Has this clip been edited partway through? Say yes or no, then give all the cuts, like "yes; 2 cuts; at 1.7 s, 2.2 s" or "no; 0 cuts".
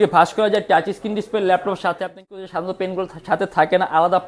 yes; 1 cut; at 2.2 s